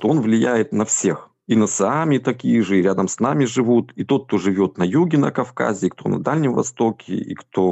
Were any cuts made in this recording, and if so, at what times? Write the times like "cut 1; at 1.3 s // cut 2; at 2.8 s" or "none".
none